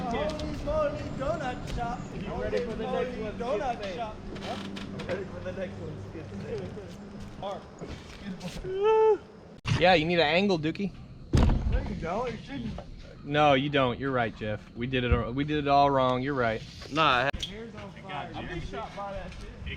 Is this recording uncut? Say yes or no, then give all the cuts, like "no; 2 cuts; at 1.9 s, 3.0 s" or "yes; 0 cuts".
no; 4 cuts; at 1.0 s, 7.4 s, 9.7 s, 17.3 s